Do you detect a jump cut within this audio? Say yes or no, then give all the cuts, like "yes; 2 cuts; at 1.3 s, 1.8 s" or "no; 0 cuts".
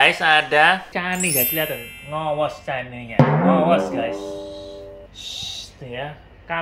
no; 0 cuts